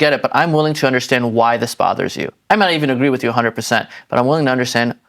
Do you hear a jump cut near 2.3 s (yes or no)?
yes